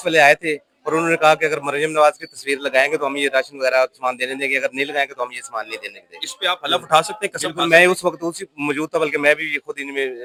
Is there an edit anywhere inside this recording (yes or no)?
no